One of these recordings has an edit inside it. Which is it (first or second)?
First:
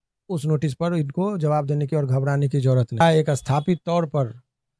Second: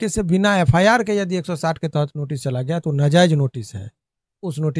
first